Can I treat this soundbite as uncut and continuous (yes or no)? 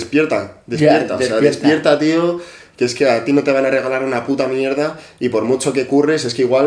yes